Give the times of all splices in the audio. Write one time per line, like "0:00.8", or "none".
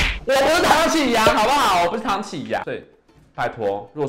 0:02.6

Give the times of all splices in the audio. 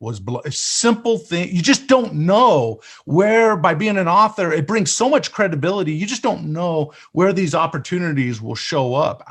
none

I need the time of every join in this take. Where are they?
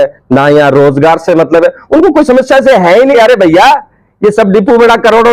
0:03.1

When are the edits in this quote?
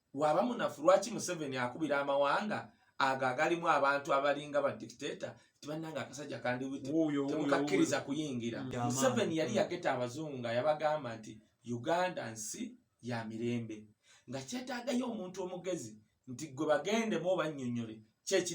0:08.7

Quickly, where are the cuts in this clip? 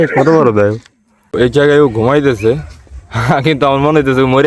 0:01.3

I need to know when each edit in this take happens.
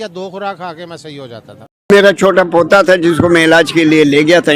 0:01.9

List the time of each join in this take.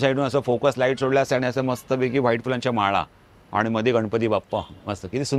none

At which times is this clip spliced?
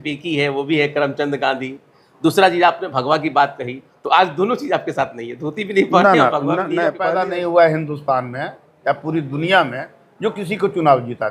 0:07.0

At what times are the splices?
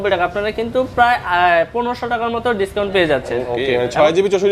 0:03.4

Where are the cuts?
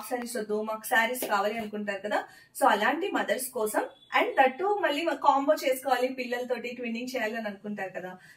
none

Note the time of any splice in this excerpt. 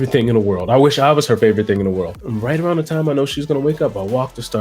0:02.2

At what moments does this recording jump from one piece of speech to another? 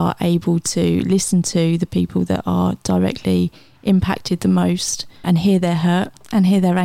0:05.2

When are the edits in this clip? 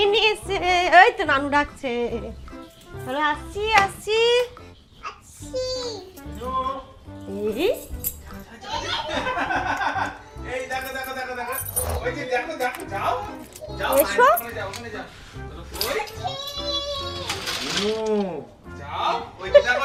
none

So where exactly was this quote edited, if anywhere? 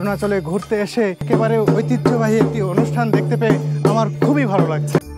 0:01.2

